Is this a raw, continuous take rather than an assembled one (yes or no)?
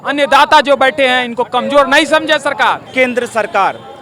no